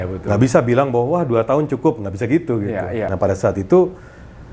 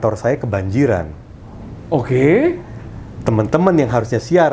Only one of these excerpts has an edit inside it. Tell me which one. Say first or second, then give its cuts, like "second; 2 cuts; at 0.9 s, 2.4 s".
first; 1 cut; at 3.1 s